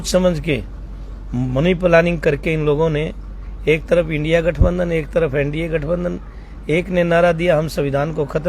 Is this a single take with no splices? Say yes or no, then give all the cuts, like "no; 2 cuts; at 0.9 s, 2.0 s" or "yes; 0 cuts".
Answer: yes; 0 cuts